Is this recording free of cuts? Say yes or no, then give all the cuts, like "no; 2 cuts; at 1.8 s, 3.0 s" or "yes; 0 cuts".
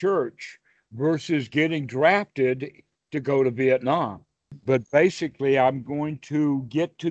no; 1 cut; at 4.6 s